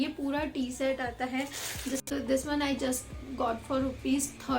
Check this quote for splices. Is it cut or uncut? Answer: cut